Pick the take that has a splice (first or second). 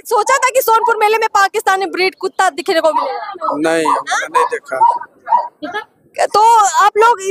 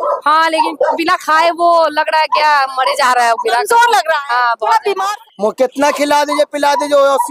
second